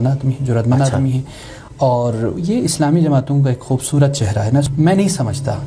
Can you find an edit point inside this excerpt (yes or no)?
yes